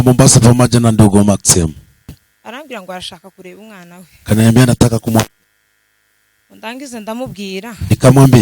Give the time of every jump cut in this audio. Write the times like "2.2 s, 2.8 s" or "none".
2.2 s